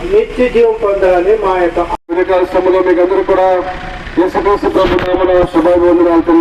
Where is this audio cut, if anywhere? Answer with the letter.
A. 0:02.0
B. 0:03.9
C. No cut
A